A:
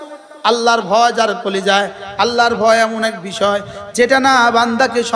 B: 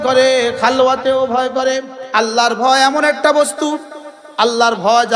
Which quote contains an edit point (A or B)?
B